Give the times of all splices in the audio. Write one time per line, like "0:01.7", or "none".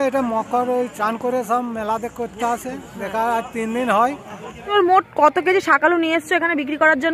0:04.7